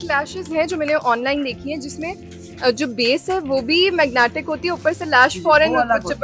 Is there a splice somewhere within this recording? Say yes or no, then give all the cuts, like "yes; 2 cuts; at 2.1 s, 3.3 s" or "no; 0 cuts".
no; 0 cuts